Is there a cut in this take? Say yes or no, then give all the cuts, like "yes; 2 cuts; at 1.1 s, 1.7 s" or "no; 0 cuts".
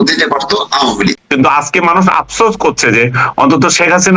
yes; 1 cut; at 1.2 s